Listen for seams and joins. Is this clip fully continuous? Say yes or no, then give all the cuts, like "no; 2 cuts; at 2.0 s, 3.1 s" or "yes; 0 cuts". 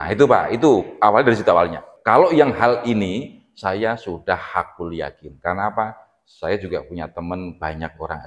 no; 1 cut; at 1.9 s